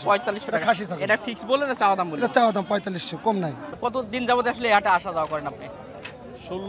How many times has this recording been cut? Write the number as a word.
one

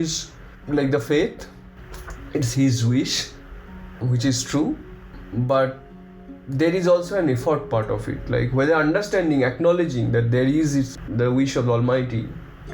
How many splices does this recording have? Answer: one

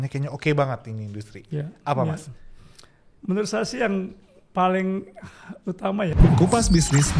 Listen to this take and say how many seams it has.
one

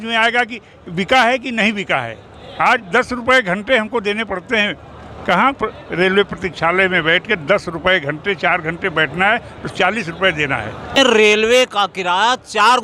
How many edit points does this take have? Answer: one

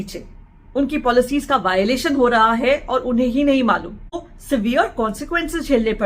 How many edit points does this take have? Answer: one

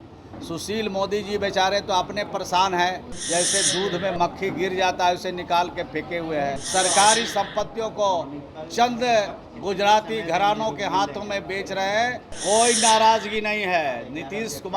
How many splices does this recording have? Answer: three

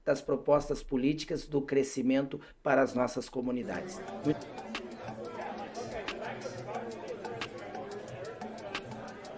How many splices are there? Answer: one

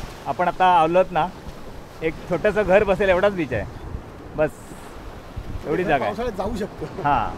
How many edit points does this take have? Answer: zero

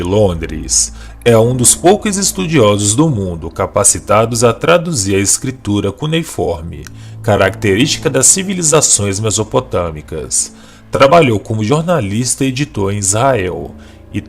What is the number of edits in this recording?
one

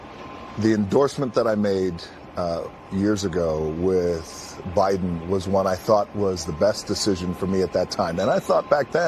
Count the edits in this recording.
zero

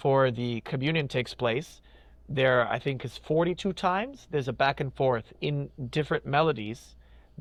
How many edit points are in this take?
zero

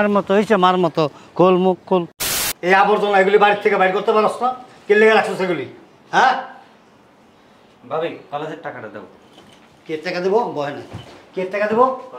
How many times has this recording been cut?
one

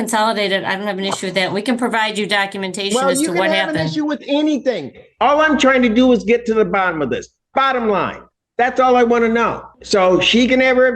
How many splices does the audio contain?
one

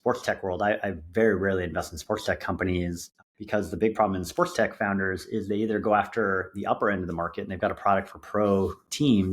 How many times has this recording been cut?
one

